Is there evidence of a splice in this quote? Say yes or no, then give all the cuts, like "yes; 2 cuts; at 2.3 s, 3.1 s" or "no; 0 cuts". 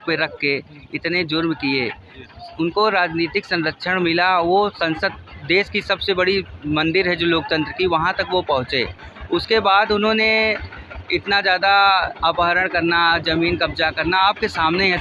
no; 0 cuts